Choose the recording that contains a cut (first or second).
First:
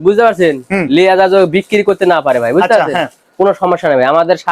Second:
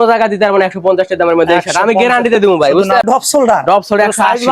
second